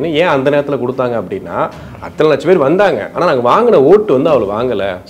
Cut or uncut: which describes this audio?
uncut